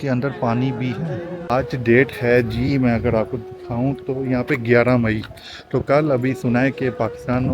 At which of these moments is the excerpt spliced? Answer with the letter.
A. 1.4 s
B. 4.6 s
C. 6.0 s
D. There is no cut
A